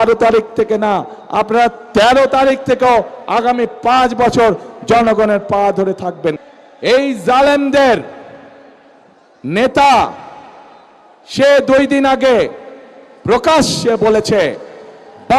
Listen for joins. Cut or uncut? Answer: cut